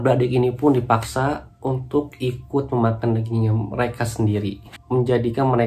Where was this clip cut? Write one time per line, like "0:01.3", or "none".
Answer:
0:04.7